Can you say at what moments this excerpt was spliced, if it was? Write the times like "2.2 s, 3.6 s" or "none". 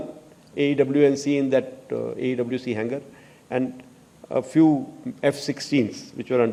none